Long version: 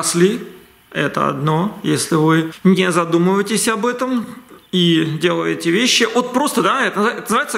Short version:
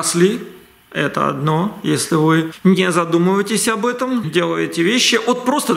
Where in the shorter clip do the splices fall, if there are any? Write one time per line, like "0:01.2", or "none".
0:04.3